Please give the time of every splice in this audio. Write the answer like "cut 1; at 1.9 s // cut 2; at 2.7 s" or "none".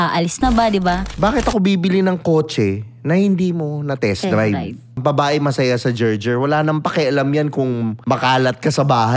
cut 1; at 1.1 s // cut 2; at 5.0 s // cut 3; at 8.0 s